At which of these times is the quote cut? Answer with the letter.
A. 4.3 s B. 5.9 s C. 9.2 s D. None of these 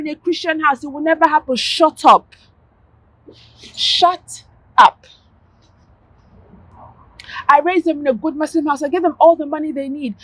D